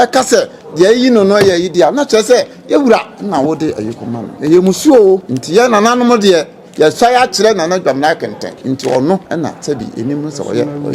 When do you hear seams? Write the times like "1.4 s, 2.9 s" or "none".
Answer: 4.3 s, 5.3 s, 8.5 s, 9.2 s